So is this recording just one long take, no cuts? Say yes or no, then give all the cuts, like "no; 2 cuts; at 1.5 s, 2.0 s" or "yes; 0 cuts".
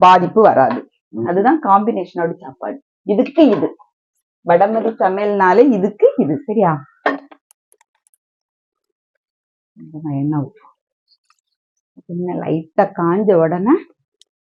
yes; 0 cuts